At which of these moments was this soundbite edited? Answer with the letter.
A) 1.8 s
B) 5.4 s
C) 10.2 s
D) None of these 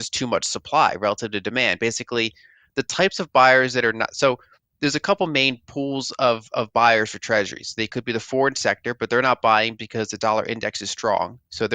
D